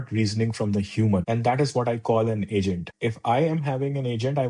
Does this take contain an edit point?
yes; 2 cuts; at 1.2 s, 2.9 s

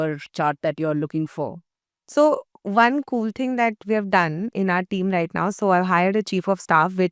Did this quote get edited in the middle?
no; 0 cuts

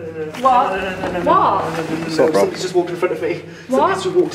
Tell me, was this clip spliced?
no; 0 cuts

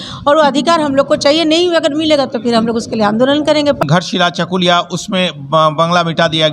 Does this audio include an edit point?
yes; 1 cut; at 3.8 s

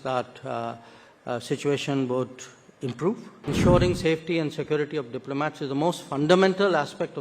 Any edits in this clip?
yes; 1 cut; at 3.4 s

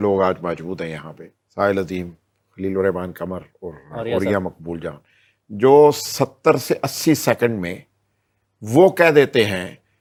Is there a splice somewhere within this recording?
no; 0 cuts

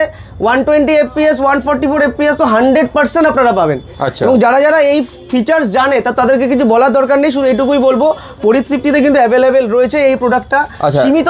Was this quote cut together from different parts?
no; 0 cuts

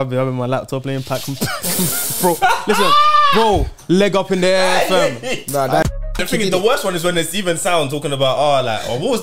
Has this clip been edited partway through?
yes; 1 cut; at 5.8 s

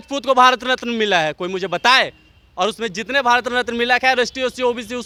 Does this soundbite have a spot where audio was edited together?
no; 0 cuts

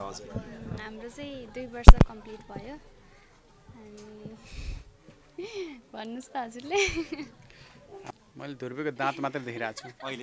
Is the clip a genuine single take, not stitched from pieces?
no; 1 cut; at 8.0 s

